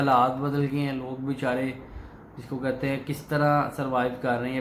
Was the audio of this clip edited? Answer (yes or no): no